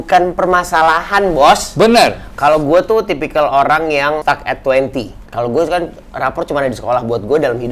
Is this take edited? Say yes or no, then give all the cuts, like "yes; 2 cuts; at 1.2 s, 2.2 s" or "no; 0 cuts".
yes; 3 cuts; at 2.3 s, 4.2 s, 5.2 s